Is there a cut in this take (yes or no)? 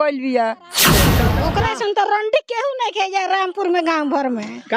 yes